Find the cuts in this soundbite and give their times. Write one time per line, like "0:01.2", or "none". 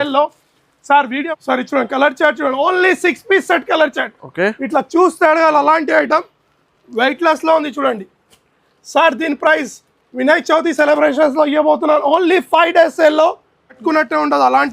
0:01.2
0:13.7